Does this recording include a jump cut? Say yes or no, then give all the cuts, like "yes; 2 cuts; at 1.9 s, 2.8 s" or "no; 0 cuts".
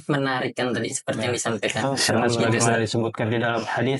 yes; 1 cut; at 2.4 s